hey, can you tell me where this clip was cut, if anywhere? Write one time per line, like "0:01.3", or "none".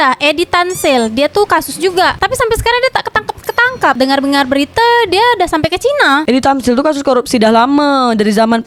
none

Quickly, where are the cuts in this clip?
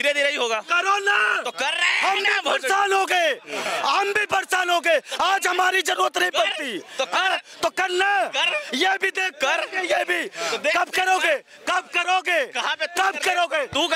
none

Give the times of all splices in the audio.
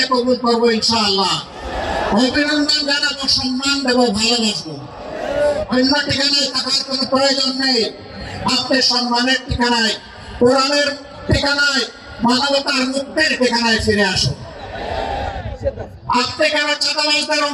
none

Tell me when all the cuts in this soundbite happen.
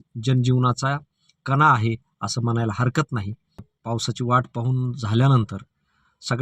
0:03.5

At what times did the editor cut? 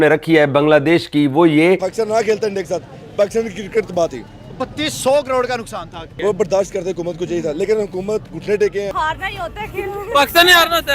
0:01.9
0:06.0
0:08.9

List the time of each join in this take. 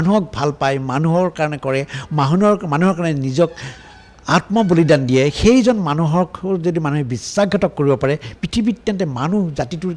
none

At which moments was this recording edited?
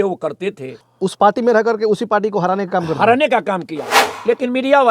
0:00.9
0:03.8

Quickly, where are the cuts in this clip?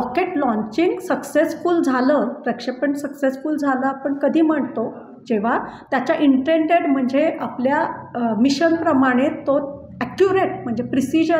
none

